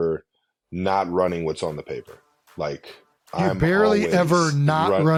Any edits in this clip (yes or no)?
no